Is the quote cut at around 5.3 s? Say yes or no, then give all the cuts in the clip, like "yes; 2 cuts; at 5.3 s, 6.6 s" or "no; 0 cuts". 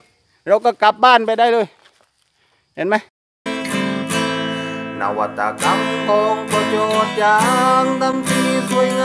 no; 1 cut; at 3.2 s